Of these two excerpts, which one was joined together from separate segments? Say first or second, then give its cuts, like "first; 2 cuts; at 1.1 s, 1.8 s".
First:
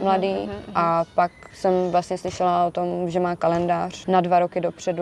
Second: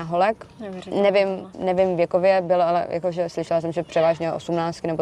first; 2 cuts; at 1.5 s, 3.9 s